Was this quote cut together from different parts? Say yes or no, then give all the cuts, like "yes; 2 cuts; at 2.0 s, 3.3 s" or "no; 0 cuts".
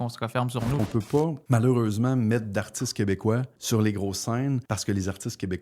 yes; 3 cuts; at 0.9 s, 3.5 s, 4.6 s